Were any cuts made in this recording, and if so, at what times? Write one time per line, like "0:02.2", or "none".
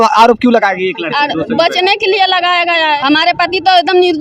0:03.0